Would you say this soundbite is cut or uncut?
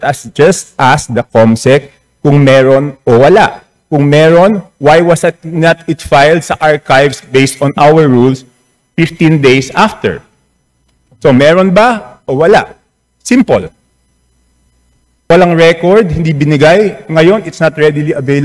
cut